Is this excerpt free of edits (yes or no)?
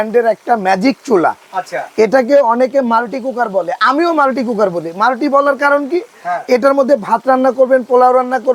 yes